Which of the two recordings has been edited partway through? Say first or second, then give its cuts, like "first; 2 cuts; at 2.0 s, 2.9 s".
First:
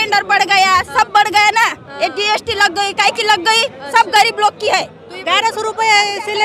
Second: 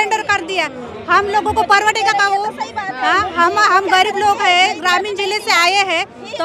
first; 1 cut; at 5.2 s